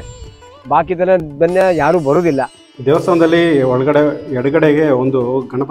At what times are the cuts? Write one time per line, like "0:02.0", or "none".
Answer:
0:02.6